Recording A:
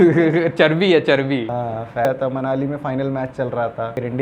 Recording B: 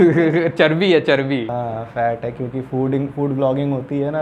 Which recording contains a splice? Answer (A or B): A